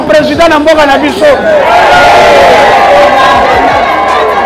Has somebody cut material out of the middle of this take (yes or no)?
no